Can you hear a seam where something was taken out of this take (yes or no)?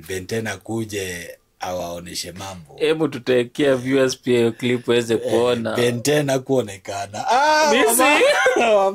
yes